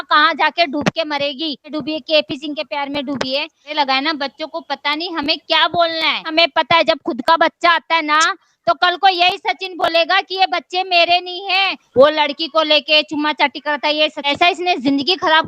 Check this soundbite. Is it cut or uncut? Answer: cut